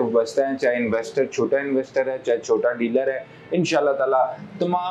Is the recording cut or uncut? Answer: uncut